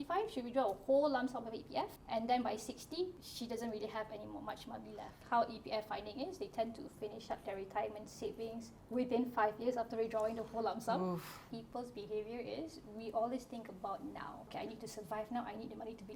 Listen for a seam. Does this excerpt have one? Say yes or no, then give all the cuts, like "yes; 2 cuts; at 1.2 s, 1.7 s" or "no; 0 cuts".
yes; 5 cuts; at 2.0 s, 3.2 s, 5.2 s, 11.4 s, 14.5 s